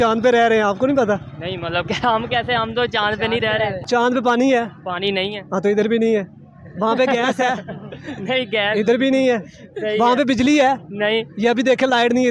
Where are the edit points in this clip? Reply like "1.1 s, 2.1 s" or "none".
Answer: 3.8 s